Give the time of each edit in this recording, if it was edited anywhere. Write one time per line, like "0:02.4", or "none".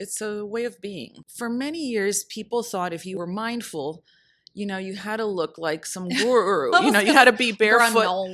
0:01.2
0:03.2

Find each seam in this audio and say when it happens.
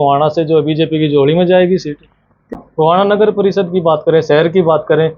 0:02.6

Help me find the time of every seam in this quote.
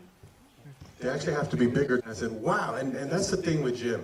0:02.1

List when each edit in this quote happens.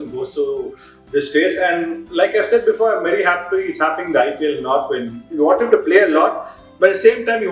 0:05.2

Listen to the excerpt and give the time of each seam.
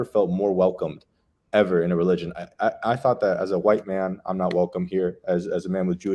none

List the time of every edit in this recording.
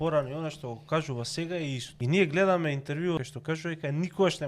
0:01.9
0:03.3

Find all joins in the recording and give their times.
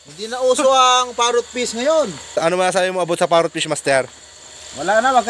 none

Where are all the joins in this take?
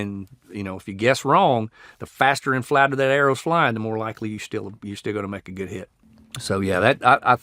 0:06.0

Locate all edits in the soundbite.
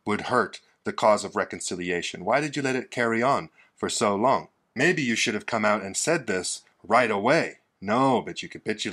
0:04.6

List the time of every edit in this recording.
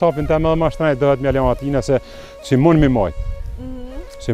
none

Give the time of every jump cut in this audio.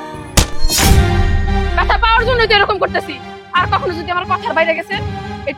none

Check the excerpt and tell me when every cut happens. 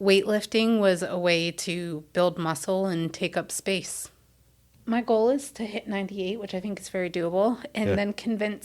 0:04.6

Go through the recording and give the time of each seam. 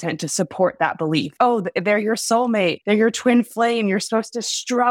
0:01.3
0:02.8

